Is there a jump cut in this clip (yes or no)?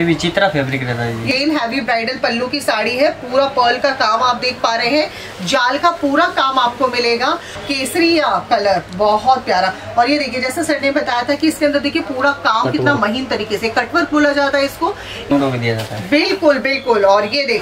yes